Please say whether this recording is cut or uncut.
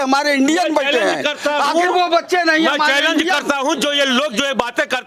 uncut